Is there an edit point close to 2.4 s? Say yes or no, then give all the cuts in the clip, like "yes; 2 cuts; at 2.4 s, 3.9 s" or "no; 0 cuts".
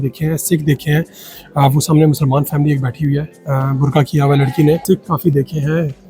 no; 1 cut; at 4.8 s